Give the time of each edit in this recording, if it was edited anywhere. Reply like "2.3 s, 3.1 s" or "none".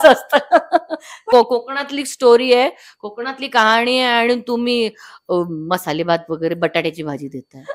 1.3 s